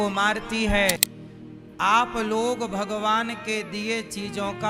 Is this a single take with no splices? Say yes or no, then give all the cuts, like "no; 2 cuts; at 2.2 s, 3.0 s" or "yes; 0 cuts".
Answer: no; 1 cut; at 1.1 s